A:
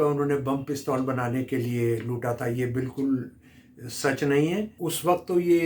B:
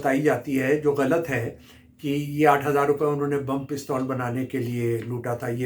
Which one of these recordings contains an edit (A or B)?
A